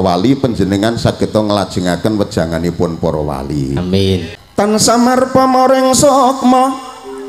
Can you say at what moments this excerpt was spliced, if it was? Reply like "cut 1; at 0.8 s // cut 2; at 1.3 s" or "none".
cut 1; at 4.3 s